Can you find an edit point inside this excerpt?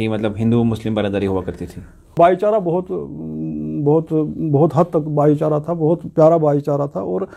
yes; 1 cut; at 2.1 s

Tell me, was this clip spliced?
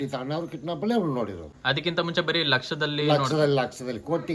no; 0 cuts

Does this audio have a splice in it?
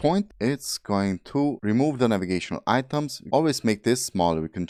no; 0 cuts

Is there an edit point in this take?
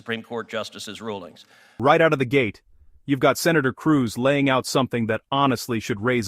yes; 1 cut; at 1.7 s

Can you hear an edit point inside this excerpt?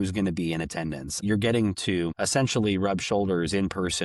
yes; 2 cuts; at 1.2 s, 2.2 s

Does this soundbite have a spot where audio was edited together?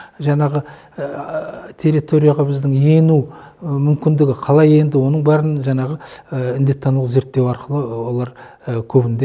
no; 0 cuts

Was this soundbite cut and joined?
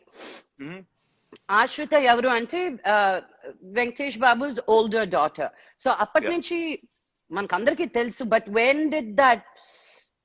no; 0 cuts

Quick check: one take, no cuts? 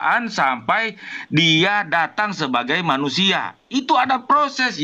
yes; 0 cuts

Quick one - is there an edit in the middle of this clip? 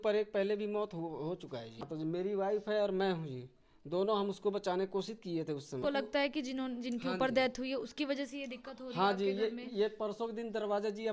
yes; 2 cuts; at 1.9 s, 5.8 s

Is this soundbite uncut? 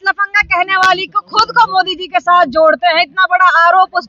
yes; 0 cuts

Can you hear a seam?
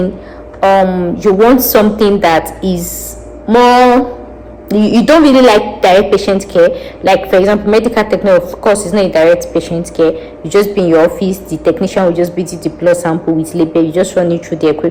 no; 0 cuts

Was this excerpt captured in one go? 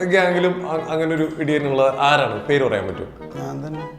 yes; 0 cuts

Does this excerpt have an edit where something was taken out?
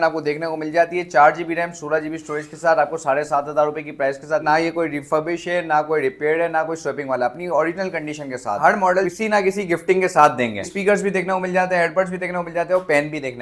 yes; 2 cuts; at 8.6 s, 10.7 s

